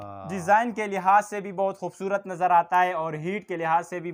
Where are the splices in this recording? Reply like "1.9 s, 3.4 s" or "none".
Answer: none